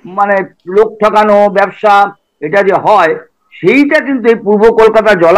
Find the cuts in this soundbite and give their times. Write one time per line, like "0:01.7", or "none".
none